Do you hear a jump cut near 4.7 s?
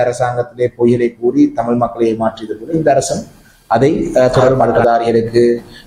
yes; 1 cut; at 4.7 s

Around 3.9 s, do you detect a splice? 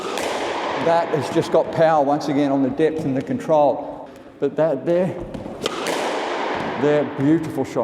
yes; 1 cut; at 3.9 s

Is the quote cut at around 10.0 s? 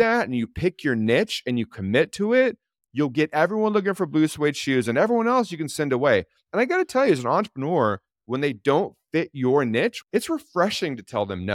yes; 1 cut; at 10.0 s

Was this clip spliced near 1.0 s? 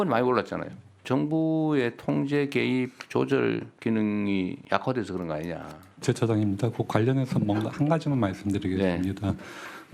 yes; 4 cuts; at 1.0 s, 3.7 s, 4.6 s, 6.0 s

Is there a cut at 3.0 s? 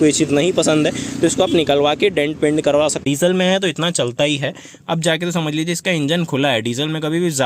yes; 1 cut; at 3.0 s

